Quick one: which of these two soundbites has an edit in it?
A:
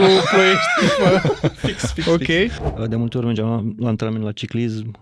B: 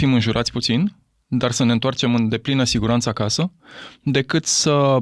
A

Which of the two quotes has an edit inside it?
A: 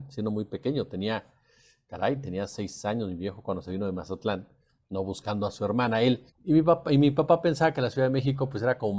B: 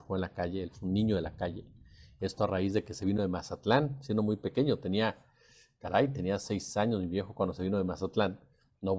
A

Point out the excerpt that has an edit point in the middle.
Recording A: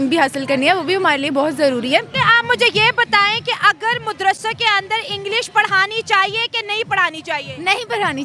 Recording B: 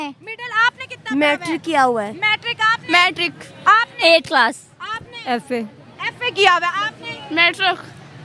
A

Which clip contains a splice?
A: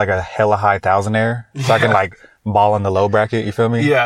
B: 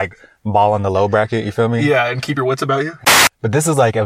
B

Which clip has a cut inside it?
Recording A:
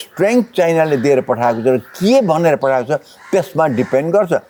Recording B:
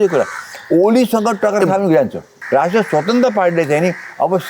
B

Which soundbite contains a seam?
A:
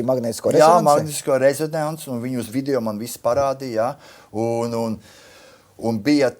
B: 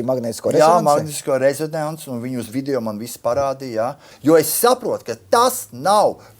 B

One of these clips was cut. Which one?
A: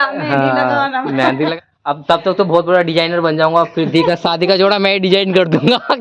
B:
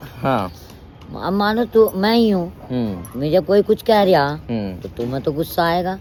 A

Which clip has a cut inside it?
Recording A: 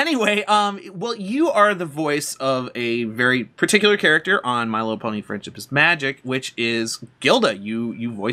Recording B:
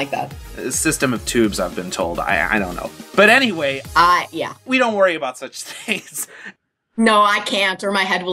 B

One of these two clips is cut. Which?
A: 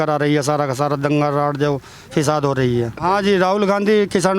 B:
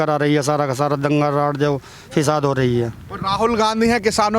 A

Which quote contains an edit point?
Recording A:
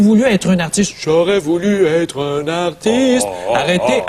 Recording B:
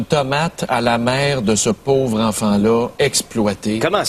B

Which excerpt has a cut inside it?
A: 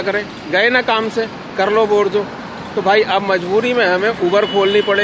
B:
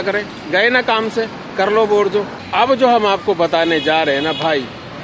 B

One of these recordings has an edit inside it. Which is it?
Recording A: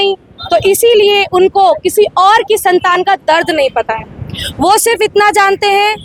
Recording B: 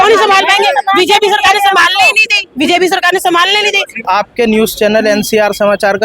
B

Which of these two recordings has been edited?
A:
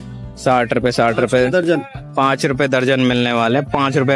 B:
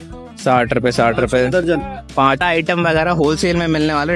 B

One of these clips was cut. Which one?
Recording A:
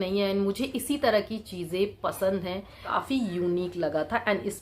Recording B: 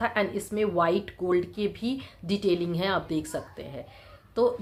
A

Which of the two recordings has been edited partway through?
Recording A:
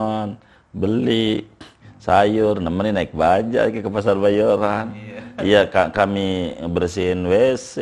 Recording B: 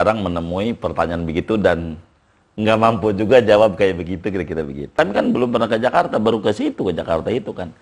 B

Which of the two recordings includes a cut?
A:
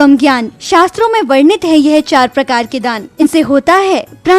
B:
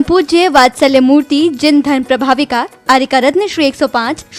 A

